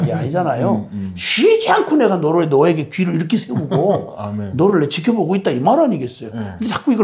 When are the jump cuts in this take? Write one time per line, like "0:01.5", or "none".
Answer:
none